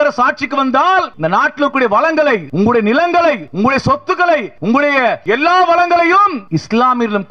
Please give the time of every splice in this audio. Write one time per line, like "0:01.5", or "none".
0:01.1
0:02.5
0:03.5
0:04.5
0:05.2
0:06.4